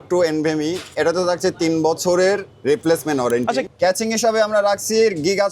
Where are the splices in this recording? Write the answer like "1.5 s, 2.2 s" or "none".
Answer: 3.7 s

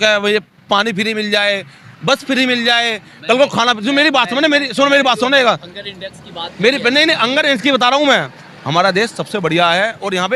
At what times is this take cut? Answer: none

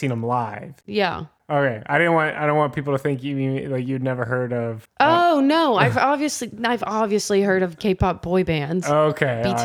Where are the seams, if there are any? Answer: 1.1 s

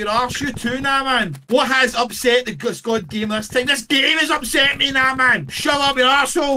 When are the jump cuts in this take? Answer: 1.4 s, 5.5 s

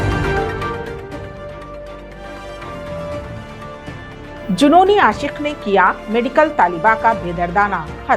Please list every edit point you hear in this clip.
none

